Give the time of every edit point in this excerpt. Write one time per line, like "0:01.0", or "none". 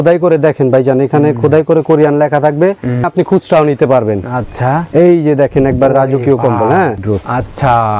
0:03.1
0:07.1